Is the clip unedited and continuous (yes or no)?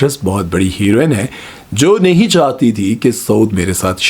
yes